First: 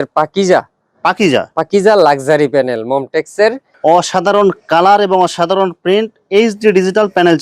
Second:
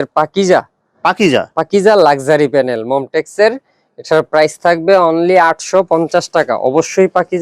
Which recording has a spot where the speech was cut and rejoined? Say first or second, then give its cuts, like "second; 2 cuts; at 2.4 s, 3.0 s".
first; 1 cut; at 3.7 s